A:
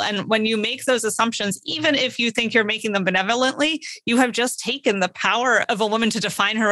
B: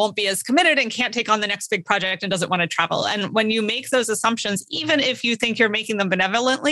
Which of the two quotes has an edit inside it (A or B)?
A